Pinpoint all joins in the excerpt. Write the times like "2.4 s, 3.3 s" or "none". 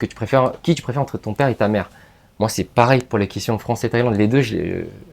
none